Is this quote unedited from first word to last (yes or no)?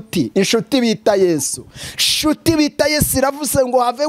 yes